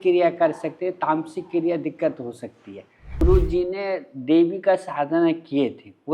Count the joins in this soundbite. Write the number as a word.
one